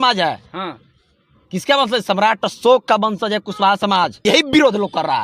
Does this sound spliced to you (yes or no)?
yes